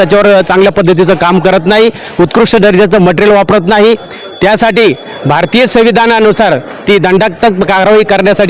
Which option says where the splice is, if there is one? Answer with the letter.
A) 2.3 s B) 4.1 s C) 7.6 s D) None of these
D